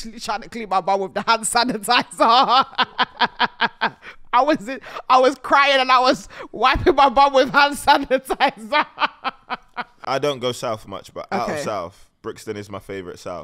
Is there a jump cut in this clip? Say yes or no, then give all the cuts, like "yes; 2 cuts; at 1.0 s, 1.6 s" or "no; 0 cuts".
yes; 1 cut; at 10.0 s